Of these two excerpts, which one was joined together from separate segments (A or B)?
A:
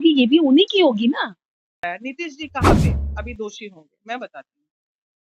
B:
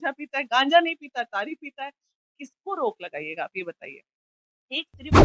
A